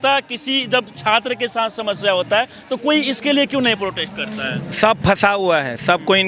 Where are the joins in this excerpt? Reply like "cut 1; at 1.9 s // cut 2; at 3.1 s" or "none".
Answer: none